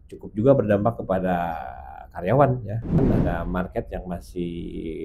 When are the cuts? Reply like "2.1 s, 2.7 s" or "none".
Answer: 3.0 s